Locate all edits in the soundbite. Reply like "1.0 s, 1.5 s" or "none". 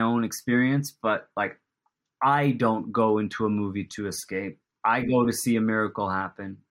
4.6 s